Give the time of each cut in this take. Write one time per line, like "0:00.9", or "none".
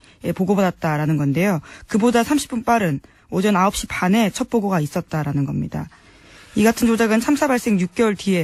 0:02.0